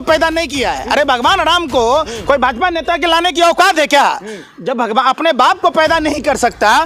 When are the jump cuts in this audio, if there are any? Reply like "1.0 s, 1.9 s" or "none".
none